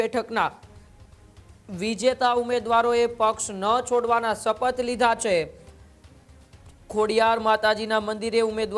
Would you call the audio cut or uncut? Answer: uncut